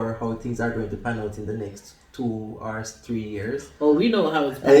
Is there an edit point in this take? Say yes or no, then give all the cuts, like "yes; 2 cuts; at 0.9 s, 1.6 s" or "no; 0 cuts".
no; 0 cuts